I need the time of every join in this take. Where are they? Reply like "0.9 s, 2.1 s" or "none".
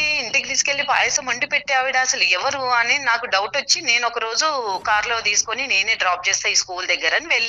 none